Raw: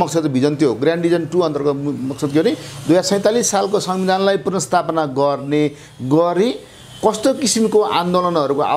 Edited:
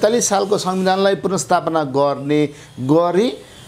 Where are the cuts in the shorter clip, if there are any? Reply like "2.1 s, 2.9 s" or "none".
none